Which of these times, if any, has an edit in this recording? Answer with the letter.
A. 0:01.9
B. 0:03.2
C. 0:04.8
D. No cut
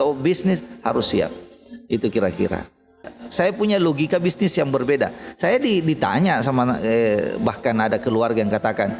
B